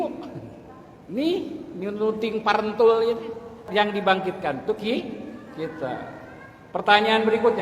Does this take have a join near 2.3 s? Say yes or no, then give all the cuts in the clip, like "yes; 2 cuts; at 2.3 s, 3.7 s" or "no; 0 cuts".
no; 1 cut; at 3.7 s